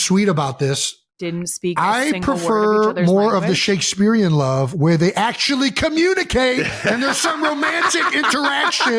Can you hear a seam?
yes; 1 cut; at 1.1 s

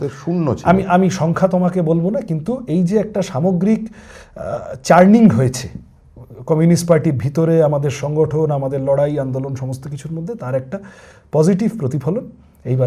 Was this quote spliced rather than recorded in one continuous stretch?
no; 0 cuts

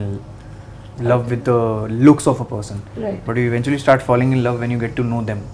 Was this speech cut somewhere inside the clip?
no; 0 cuts

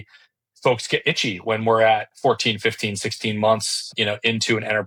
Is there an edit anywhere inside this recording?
no; 0 cuts

